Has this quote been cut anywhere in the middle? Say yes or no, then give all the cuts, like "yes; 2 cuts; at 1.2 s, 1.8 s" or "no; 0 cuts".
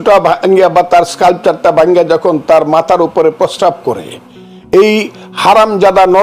no; 0 cuts